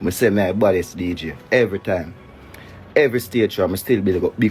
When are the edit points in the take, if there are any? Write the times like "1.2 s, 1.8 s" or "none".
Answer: none